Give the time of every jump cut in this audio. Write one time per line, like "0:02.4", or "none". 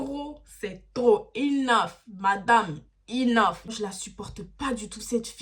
0:03.7